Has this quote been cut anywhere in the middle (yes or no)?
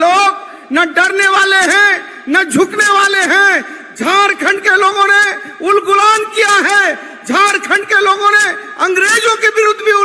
no